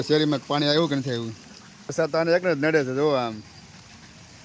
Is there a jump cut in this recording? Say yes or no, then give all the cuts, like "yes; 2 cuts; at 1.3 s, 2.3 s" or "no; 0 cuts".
yes; 1 cut; at 1.9 s